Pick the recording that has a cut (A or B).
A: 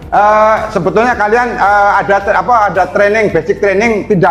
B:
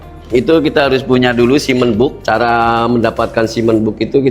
B